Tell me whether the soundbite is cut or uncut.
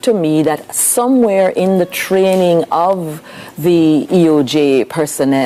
uncut